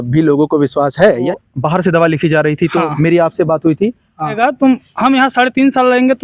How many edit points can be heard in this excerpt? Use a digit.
2